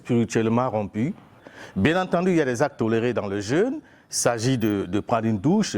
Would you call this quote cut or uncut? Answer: cut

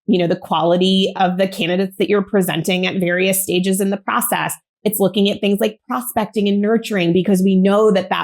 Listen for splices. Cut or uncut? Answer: cut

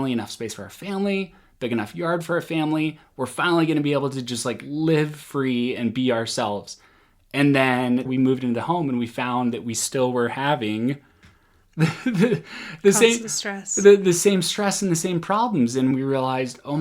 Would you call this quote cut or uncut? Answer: cut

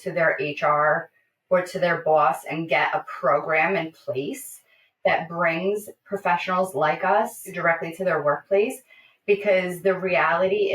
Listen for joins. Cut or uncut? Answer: cut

